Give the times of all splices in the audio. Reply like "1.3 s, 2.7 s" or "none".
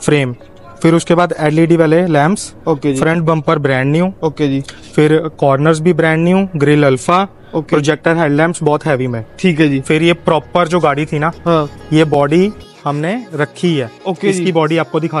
none